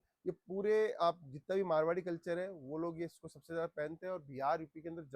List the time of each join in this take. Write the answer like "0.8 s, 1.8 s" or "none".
none

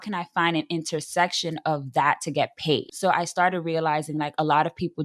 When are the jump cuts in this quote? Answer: 2.9 s

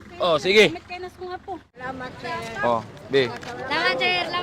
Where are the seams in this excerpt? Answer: 1.8 s

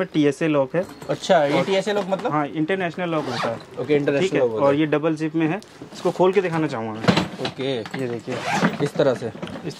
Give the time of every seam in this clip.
none

